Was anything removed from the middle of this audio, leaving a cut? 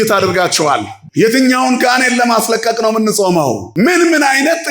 yes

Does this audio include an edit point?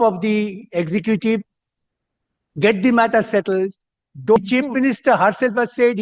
yes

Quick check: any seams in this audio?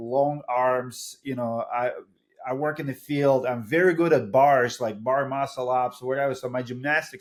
no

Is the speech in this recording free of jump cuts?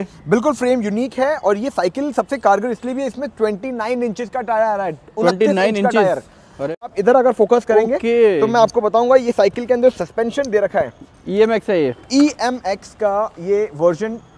no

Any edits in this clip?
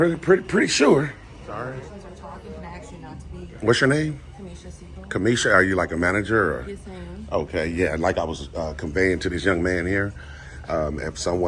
yes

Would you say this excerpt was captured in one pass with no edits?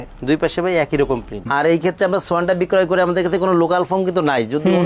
no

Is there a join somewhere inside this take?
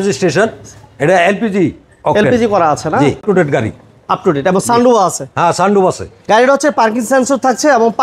yes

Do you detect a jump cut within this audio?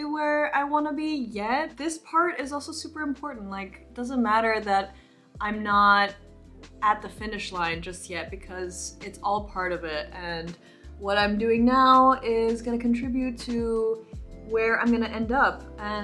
yes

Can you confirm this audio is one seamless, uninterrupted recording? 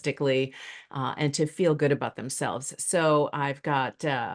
yes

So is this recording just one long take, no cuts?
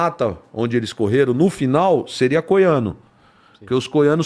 yes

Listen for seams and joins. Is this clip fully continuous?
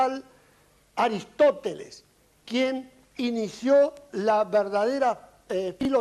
yes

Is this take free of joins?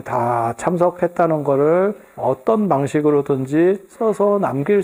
yes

